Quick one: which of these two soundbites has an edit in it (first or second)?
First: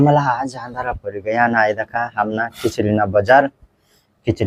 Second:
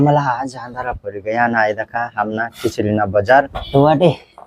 second